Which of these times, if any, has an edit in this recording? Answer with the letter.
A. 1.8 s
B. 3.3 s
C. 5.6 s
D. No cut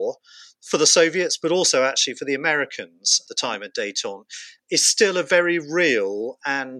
B